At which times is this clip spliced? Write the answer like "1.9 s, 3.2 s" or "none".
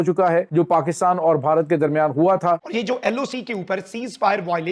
2.6 s